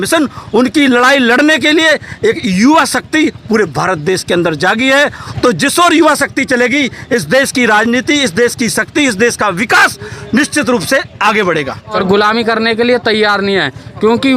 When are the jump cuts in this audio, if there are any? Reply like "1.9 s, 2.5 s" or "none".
5.2 s, 12.0 s